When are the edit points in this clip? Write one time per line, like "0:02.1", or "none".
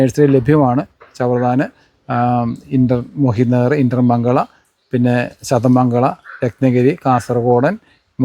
none